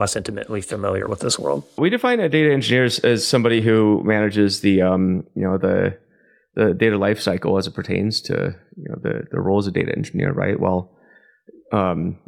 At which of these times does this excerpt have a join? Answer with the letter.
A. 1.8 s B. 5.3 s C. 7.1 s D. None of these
A